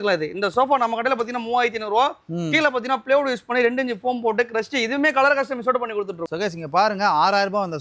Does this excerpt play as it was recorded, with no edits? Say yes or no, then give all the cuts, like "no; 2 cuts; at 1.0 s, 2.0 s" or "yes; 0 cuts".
no; 1 cut; at 6.2 s